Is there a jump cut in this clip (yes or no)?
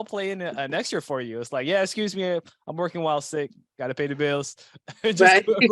no